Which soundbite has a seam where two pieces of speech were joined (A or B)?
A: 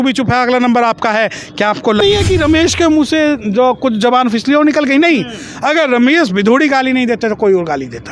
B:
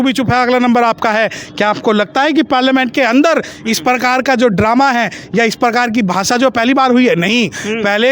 A